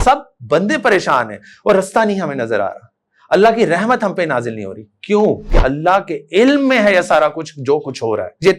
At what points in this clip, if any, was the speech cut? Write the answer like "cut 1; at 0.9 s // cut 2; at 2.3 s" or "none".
cut 1; at 5.5 s